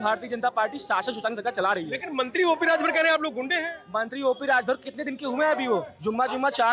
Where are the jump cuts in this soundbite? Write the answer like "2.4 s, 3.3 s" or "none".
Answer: none